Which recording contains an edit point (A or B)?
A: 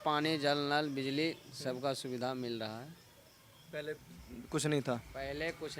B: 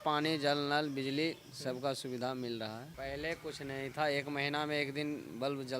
B